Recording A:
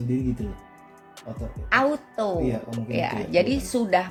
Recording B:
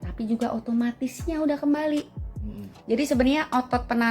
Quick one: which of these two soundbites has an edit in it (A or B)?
B